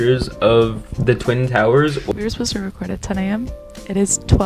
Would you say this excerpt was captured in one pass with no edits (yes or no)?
no